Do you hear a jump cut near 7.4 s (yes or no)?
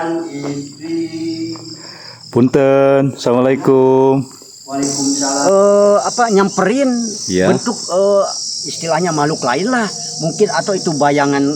no